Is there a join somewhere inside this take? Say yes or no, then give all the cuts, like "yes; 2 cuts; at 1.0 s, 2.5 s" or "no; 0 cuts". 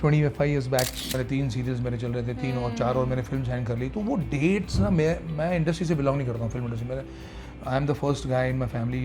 yes; 1 cut; at 1.1 s